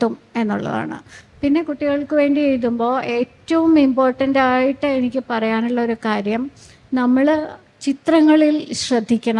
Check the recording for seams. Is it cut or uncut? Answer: uncut